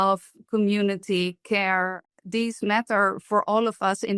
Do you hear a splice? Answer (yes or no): yes